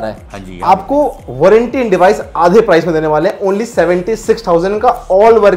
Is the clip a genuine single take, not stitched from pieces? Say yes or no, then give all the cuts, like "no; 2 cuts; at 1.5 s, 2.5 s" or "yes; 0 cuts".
yes; 0 cuts